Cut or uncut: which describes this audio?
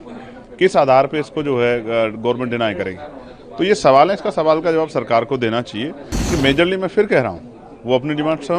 cut